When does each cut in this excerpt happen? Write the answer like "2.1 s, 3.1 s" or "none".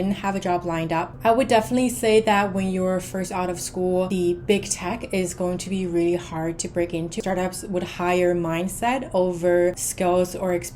1.1 s, 4.1 s, 7.2 s, 9.9 s

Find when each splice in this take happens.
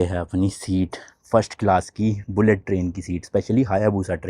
none

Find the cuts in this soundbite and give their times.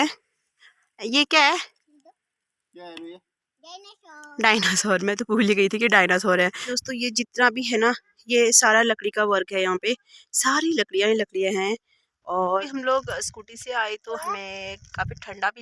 6.8 s, 12.6 s

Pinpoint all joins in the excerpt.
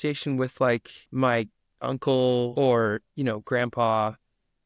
1.0 s, 2.5 s

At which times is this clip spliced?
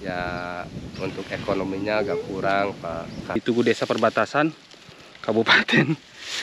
3.4 s

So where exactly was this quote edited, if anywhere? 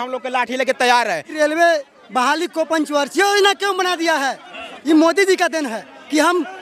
1.4 s

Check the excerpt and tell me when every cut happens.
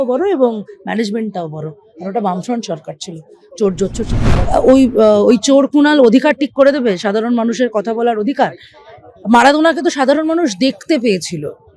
4.3 s

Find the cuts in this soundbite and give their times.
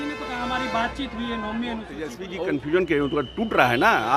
2.2 s

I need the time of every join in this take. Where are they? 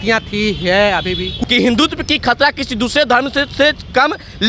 1.3 s

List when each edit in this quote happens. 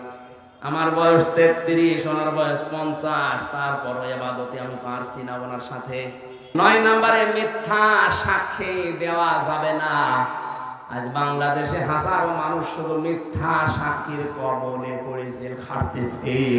6.5 s

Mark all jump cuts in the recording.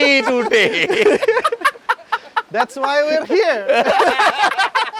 none

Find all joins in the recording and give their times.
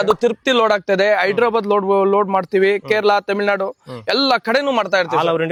none

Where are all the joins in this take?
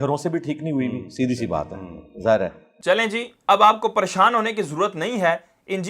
2.7 s

